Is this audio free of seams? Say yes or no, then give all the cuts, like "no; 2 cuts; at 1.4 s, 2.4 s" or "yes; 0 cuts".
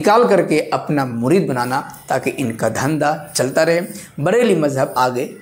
yes; 0 cuts